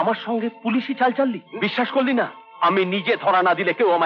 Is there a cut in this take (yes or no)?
no